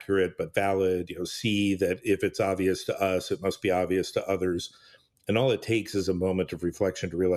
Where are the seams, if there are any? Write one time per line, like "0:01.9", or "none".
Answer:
none